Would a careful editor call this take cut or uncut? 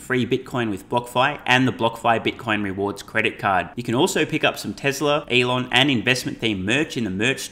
cut